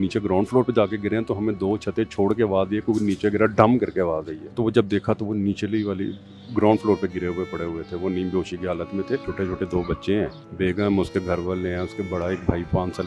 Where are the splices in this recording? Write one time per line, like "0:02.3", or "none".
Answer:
0:04.4
0:09.3
0:10.4